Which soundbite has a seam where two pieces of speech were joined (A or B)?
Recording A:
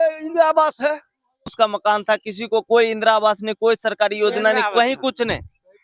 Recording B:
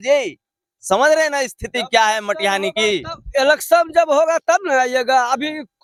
A